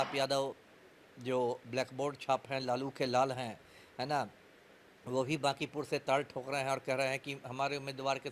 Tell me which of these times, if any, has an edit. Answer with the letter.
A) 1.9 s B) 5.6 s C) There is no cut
C